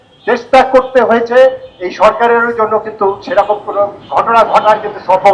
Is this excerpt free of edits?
no; 1 cut; at 4.0 s

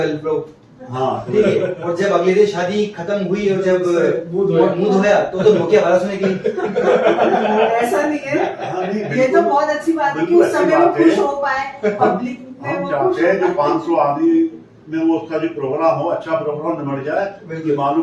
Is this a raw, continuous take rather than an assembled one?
yes; 0 cuts

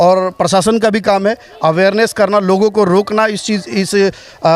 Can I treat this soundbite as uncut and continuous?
yes; 0 cuts

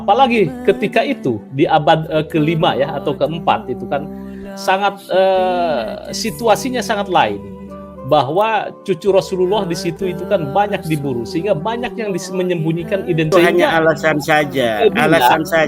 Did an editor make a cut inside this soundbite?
yes; 1 cut; at 13.3 s

